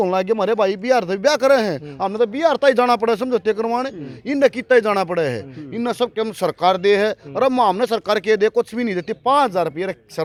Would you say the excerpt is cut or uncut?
uncut